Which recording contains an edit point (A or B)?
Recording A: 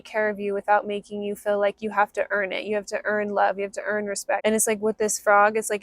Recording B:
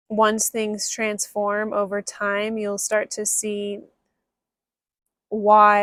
A